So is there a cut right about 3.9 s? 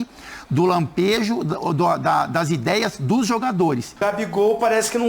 yes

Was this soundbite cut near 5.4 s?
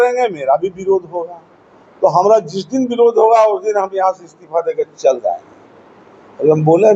no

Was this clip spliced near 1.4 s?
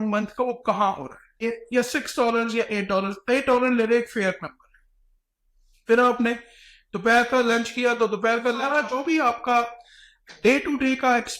yes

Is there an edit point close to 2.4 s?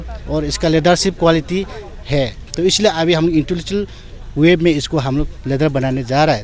yes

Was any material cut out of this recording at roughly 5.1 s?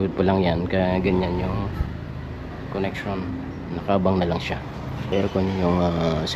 yes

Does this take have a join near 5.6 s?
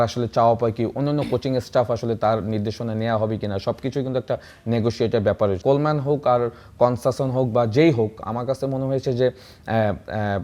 yes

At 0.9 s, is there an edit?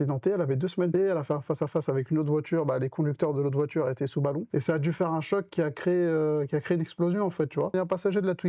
yes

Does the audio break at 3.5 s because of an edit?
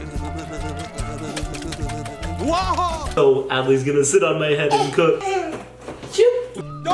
no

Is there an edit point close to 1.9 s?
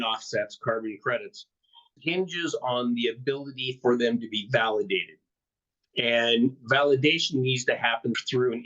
yes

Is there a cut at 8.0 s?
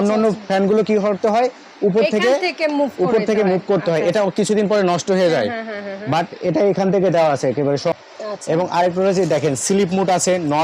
yes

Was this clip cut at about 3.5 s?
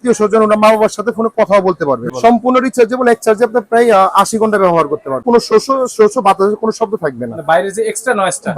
no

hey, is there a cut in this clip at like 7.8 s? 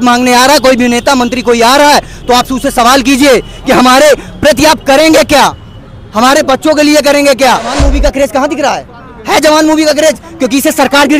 yes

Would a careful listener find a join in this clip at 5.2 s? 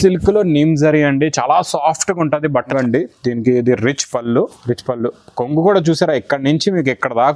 no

